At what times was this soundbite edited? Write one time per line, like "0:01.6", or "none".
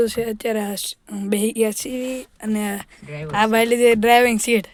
none